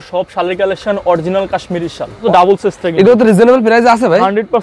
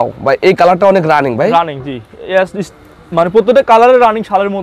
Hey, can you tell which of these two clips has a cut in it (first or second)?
first